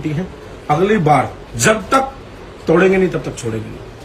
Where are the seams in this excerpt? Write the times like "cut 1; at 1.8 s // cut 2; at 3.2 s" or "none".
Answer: cut 1; at 1.4 s

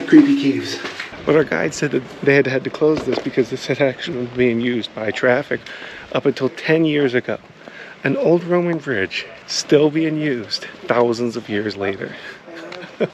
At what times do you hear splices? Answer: cut 1; at 1.1 s

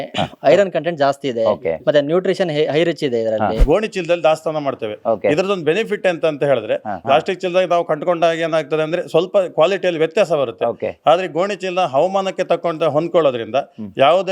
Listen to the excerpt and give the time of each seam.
cut 1; at 3.6 s // cut 2; at 7.0 s

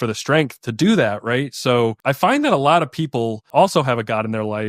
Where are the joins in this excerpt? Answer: cut 1; at 2.0 s // cut 2; at 3.5 s

